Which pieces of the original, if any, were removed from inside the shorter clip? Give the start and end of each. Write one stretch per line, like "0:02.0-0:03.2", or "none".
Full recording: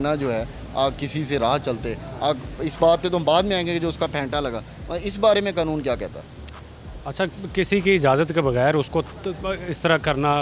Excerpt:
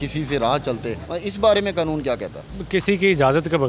0:02.0-0:04.8
0:06.4-0:07.4